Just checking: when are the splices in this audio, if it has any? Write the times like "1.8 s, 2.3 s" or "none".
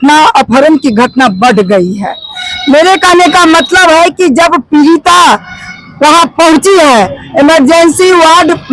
none